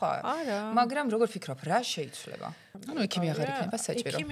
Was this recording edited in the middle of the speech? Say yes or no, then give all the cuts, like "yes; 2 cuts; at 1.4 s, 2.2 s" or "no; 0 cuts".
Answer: yes; 1 cut; at 2.7 s